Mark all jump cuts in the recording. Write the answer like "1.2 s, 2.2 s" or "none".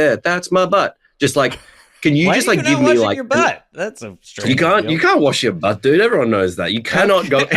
none

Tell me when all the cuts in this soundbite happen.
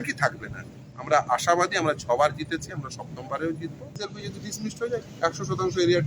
4.1 s

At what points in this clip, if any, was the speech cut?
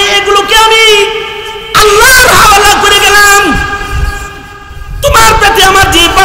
none

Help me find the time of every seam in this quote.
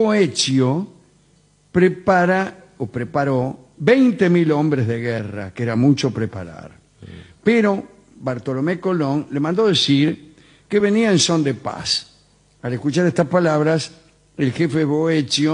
4.5 s

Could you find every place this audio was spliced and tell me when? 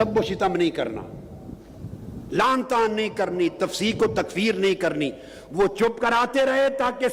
none

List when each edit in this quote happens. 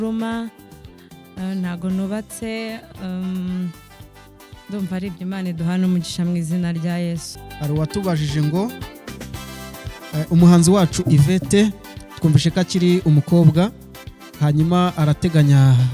7.3 s

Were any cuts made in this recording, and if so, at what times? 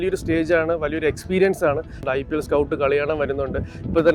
2.0 s

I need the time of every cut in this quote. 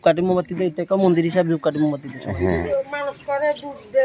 2.6 s

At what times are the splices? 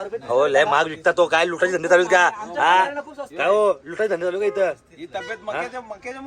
none

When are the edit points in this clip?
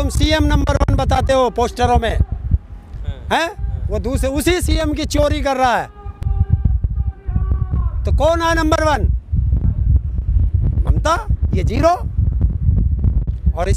none

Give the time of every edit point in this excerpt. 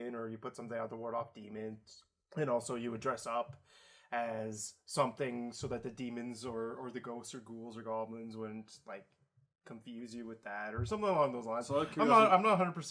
none

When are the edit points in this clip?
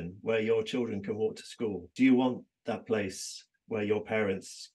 1.8 s

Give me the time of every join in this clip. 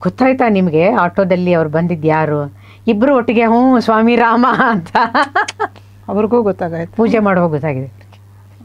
none

